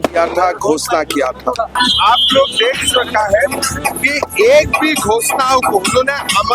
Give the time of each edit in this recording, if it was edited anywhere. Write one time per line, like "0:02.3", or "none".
0:01.7